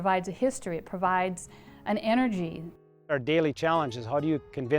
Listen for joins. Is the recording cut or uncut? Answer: cut